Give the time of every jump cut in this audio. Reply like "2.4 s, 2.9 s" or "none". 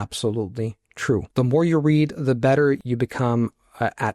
1.3 s, 2.8 s